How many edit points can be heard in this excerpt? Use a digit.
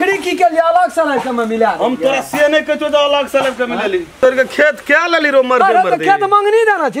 1